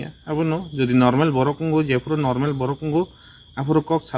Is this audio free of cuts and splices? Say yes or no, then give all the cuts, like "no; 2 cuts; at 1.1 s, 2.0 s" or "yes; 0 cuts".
no; 1 cut; at 2.9 s